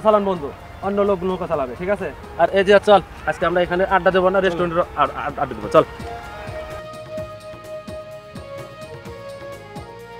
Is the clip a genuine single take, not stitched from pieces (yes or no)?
yes